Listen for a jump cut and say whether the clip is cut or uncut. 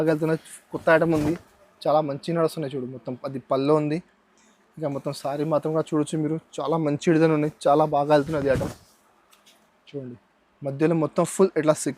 uncut